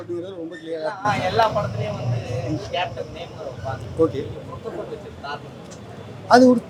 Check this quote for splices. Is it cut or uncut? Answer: uncut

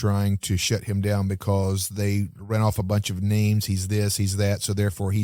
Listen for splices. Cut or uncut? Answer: uncut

